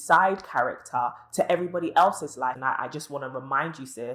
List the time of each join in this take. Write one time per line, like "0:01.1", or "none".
0:02.6